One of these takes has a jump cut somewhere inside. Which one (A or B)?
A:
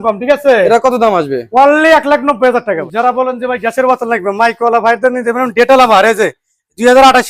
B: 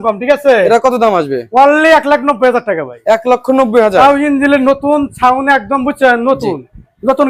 A